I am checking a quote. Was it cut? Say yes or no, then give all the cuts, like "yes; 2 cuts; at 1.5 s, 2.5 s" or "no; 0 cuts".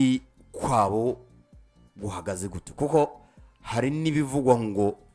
no; 0 cuts